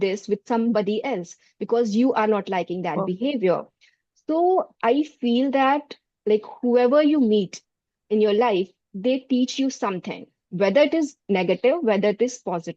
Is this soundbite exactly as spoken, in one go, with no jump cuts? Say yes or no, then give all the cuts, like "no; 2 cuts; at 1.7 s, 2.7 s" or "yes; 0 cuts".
yes; 0 cuts